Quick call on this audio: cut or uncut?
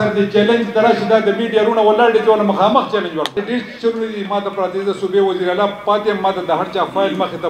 cut